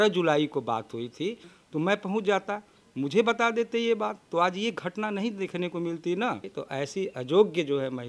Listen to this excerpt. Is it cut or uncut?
cut